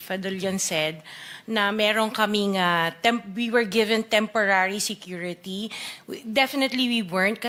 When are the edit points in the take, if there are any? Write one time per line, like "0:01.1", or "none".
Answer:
none

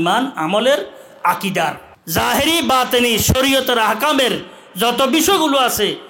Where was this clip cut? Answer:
0:01.9

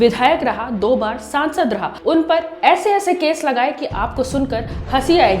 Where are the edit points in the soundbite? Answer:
0:02.0

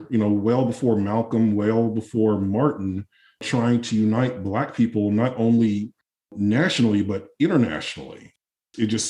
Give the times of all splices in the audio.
none

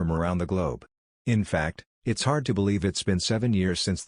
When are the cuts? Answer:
0:01.1

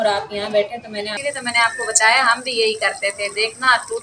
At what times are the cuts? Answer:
0:01.1

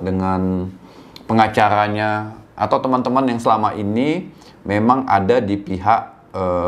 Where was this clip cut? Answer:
none

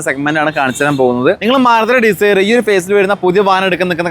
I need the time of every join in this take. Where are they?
0:01.5

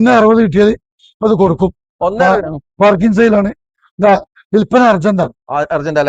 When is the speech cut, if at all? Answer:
none

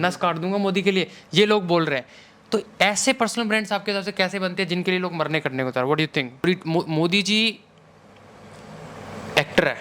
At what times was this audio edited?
0:06.5

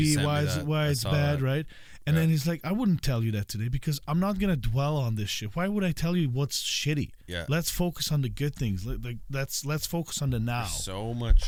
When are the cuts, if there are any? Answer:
none

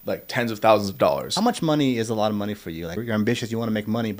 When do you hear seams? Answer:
0:01.3
0:03.0

